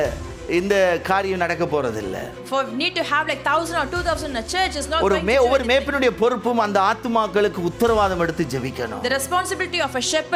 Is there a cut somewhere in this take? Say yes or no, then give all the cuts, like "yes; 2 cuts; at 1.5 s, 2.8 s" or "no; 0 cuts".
no; 0 cuts